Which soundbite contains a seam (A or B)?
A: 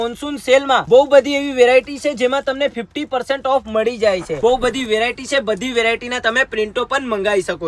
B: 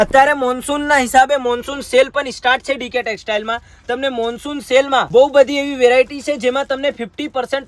A